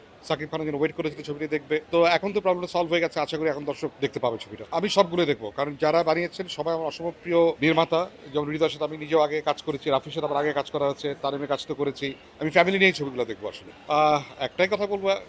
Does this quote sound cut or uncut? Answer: cut